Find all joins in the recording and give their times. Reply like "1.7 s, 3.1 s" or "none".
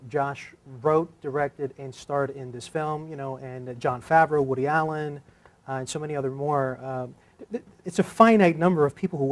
6.2 s